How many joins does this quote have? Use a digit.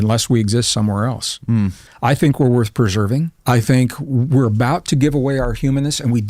2